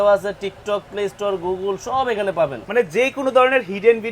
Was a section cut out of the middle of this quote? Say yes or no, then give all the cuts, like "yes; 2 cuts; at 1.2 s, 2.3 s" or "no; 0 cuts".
yes; 1 cut; at 2.6 s